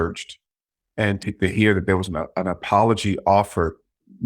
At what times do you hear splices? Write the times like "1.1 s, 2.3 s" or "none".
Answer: 0.9 s

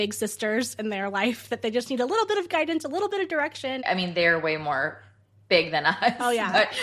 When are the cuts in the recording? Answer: 3.8 s

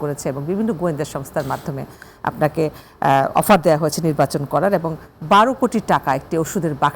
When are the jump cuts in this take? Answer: none

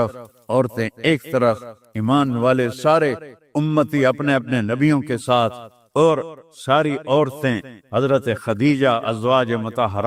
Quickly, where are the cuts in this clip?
none

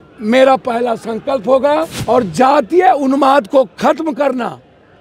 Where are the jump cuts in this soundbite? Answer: 2.0 s

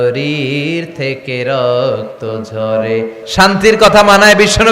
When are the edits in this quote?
3.2 s

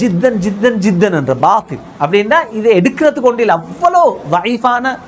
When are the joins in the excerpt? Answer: none

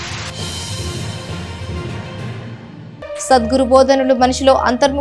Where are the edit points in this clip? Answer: 2.8 s

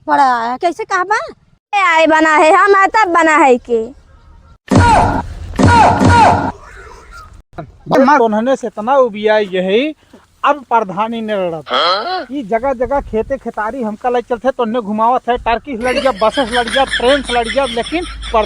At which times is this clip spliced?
7.9 s

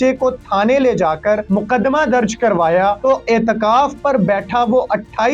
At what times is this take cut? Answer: 1.4 s, 3.0 s

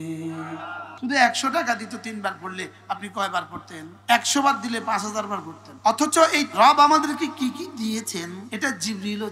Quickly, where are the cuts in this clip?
1.0 s, 6.5 s, 8.4 s

